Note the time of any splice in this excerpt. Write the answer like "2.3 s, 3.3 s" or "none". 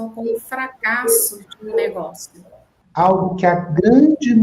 2.8 s